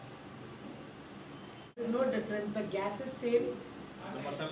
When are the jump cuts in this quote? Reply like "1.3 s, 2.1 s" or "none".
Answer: 1.8 s